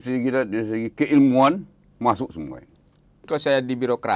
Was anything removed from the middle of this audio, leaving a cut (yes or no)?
yes